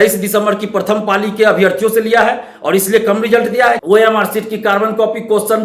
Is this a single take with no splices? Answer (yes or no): no